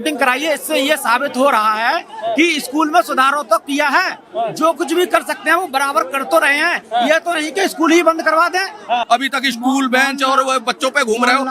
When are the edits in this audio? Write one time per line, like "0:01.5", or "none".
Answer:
0:09.1

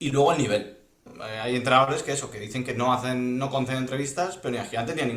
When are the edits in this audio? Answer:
0:01.1

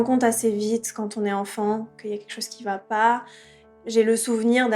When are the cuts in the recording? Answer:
0:03.6

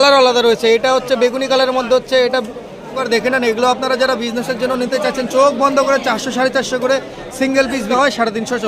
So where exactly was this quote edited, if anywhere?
0:03.0
0:07.9

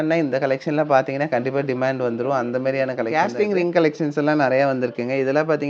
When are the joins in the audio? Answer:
0:03.1

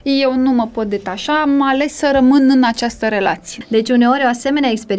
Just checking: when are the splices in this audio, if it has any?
0:03.5

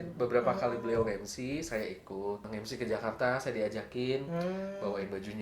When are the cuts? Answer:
0:02.5

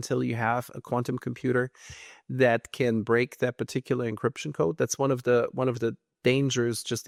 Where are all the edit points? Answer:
none

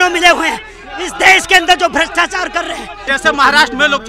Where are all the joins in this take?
0:03.1

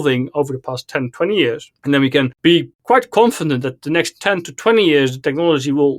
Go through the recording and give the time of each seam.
0:02.3

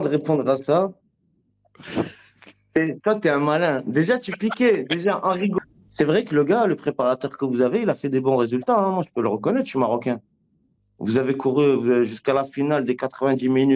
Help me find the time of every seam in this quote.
0:05.5

